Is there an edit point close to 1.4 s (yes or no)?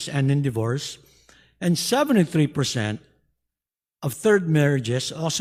no